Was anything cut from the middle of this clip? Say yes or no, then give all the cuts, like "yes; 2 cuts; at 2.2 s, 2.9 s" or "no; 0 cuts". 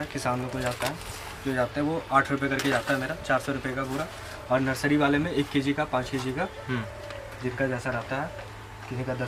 no; 0 cuts